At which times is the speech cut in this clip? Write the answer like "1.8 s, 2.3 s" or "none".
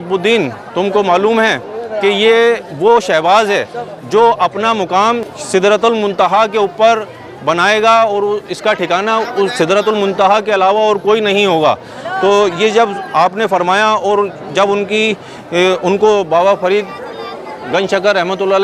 none